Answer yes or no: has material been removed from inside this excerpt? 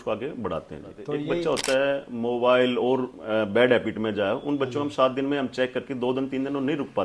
yes